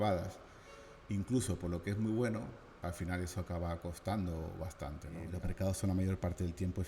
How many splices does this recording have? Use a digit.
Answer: 1